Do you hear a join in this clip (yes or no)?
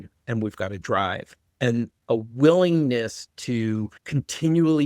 yes